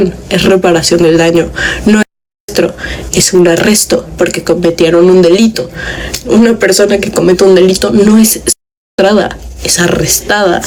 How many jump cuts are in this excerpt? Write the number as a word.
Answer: zero